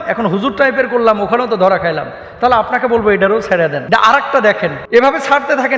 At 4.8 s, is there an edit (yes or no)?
yes